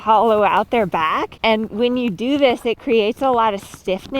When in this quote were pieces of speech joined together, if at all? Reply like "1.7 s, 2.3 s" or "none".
1.3 s